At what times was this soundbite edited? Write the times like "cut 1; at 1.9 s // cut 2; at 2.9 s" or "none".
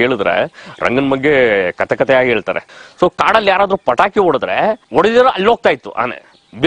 cut 1; at 2.7 s